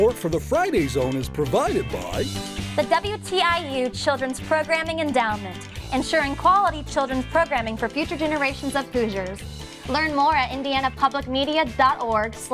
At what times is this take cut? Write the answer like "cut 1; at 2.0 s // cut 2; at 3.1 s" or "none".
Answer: none